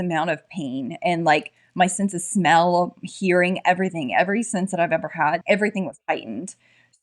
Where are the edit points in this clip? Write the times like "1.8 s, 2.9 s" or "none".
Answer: 5.4 s